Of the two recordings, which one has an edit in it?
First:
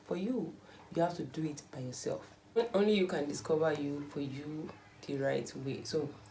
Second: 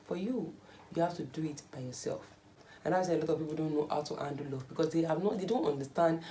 second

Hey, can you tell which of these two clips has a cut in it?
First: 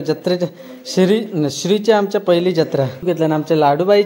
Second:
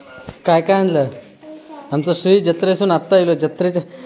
first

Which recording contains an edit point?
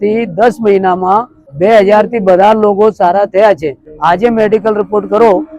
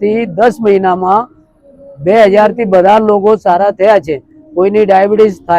first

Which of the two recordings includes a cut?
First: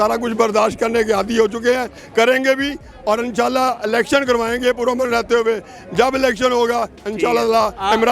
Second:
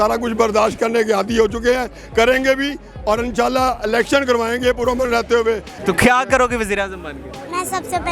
second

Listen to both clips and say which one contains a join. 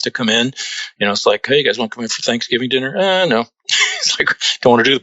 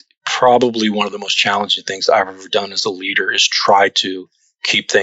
first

